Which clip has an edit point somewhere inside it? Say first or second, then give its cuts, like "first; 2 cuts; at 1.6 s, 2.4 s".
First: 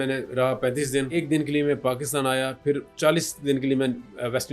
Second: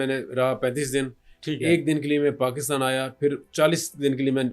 first; 1 cut; at 1.2 s